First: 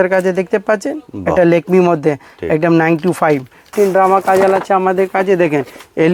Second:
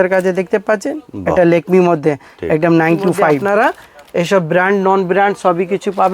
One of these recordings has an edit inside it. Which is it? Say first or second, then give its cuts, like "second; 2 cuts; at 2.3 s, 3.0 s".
second; 1 cut; at 3.4 s